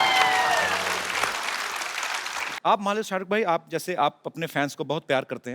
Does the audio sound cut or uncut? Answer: cut